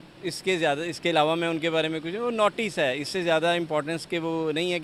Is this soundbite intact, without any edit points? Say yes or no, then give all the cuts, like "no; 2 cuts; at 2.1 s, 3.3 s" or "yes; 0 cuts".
yes; 0 cuts